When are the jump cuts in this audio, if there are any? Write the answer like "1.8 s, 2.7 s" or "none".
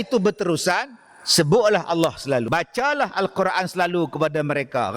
2.5 s